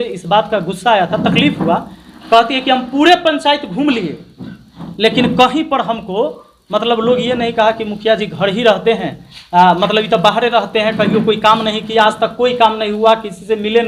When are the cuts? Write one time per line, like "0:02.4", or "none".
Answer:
none